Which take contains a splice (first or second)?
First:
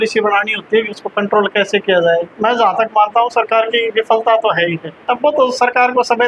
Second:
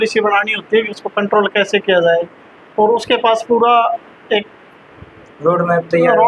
first